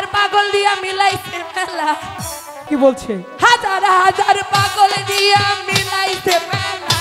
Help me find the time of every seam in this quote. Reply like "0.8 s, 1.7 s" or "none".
2.7 s